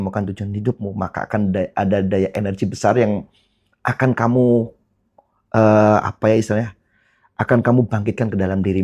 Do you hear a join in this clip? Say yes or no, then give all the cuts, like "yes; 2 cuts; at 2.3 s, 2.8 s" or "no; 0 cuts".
no; 0 cuts